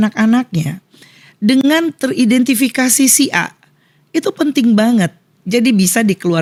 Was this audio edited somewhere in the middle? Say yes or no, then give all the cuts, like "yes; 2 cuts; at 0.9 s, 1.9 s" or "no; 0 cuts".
no; 0 cuts